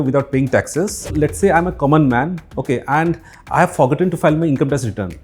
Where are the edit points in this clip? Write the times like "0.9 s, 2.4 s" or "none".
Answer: 1.1 s